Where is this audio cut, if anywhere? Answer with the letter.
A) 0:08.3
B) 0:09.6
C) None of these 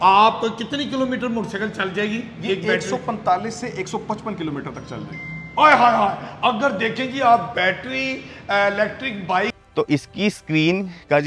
B